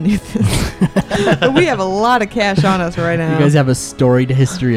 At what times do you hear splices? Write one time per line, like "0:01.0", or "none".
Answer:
none

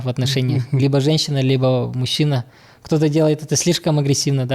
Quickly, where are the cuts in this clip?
none

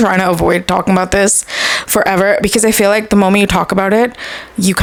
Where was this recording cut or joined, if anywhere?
none

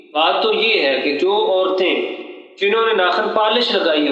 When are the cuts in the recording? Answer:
none

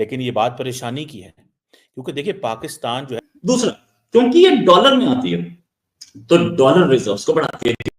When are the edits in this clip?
0:03.2

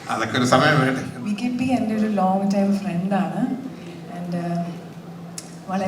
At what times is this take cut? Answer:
0:01.1

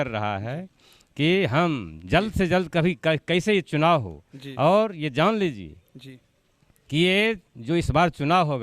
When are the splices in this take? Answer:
none

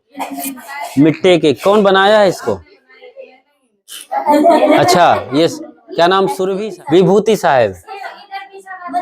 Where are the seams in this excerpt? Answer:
0:06.5

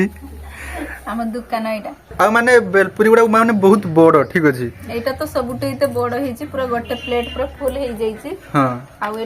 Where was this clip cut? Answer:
0:02.1

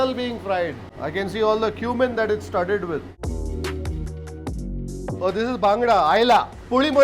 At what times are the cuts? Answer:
0:01.0
0:03.1

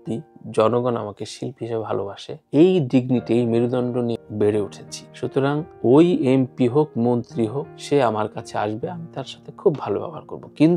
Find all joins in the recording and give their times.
0:04.2

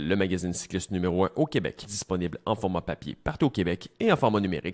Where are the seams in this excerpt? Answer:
0:01.8

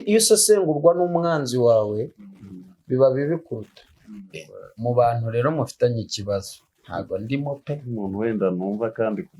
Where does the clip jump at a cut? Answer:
0:04.4

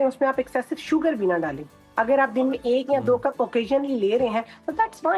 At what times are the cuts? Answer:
none

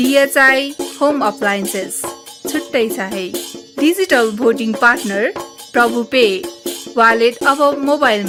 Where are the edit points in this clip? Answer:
none

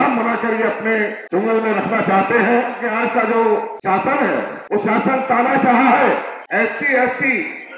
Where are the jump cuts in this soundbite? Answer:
0:01.2
0:02.8
0:03.7
0:04.6
0:06.4

